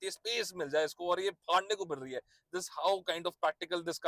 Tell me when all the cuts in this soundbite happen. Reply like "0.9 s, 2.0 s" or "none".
none